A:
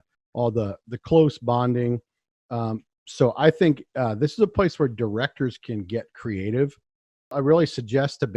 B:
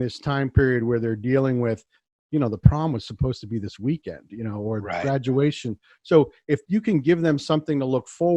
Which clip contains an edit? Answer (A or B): A